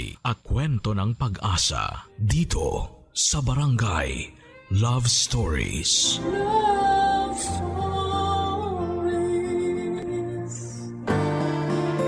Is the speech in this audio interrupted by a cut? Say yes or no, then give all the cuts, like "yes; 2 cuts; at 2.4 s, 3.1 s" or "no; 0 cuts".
yes; 1 cut; at 11.0 s